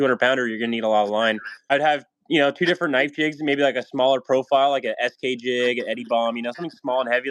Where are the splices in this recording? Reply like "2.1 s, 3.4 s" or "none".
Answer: 1.7 s